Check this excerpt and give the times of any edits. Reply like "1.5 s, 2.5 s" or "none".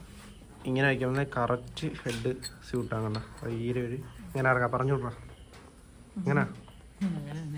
none